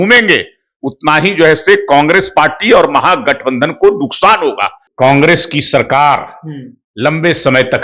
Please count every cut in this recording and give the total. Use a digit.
1